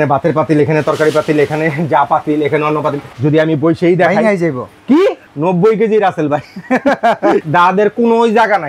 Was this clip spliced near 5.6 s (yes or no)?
no